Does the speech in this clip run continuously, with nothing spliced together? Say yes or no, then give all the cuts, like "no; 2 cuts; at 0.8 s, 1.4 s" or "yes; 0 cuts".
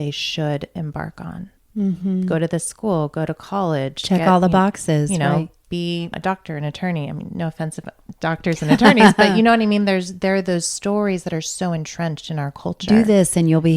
no; 2 cuts; at 1.5 s, 6.2 s